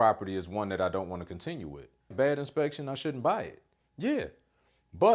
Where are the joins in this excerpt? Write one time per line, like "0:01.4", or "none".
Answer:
0:02.1